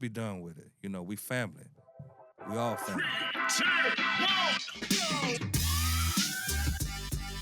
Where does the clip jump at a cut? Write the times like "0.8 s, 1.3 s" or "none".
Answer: 3.2 s